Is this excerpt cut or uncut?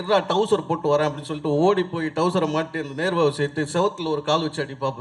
uncut